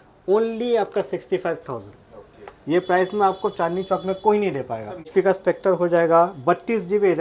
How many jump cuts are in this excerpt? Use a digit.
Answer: 1